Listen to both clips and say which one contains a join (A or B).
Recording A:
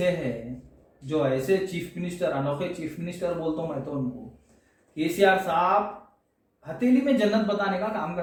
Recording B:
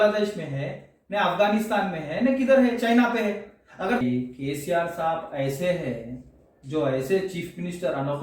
B